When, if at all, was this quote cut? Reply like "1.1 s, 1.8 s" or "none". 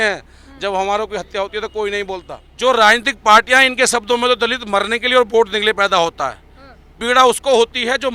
2.4 s